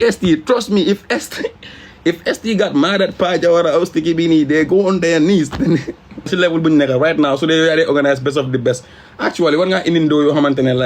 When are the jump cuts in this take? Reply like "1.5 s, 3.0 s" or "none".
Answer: 6.3 s